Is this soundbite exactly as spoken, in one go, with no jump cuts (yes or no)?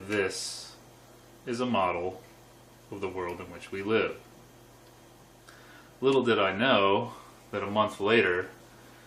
yes